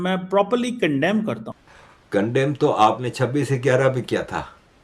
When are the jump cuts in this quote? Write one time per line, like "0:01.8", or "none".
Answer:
0:01.5

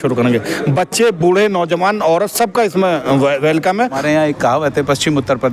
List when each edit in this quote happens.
0:03.9

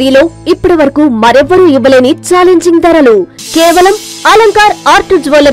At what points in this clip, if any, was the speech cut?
none

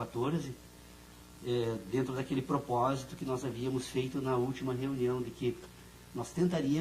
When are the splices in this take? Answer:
0:04.1

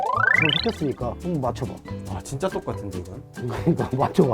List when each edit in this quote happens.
0:02.1

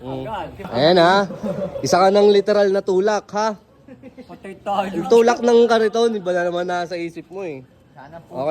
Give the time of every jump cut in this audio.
none

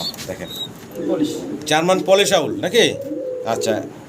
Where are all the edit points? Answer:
0:01.0

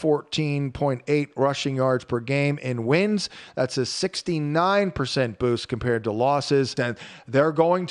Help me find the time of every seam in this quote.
0:06.9

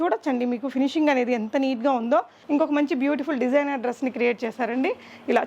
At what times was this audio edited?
0:02.4

